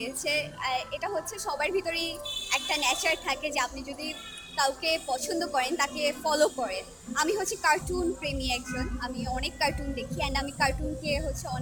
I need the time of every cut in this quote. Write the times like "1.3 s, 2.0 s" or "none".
none